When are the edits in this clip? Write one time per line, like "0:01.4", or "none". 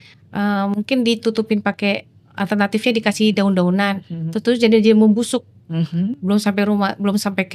none